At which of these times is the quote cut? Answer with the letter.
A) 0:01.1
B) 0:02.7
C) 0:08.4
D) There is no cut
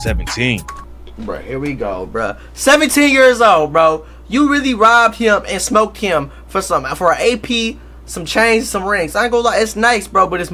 D